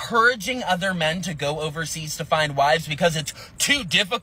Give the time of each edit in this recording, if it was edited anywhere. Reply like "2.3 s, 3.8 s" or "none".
none